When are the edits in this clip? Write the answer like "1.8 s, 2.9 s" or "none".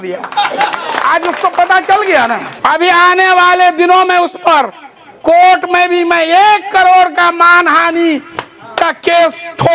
none